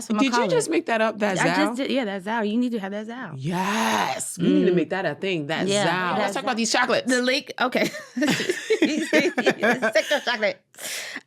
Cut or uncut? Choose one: cut